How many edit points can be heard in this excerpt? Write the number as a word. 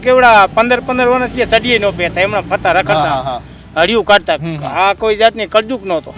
zero